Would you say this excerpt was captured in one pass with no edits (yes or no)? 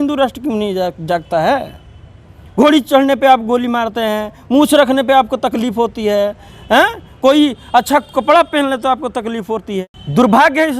no